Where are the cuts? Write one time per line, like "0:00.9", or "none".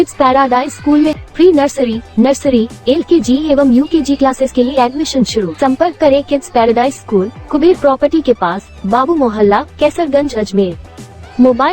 0:01.2